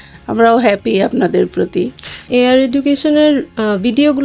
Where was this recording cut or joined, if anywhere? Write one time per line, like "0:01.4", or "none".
0:02.3